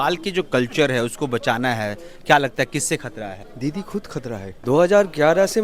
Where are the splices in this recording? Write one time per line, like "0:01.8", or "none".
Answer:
0:03.5
0:04.5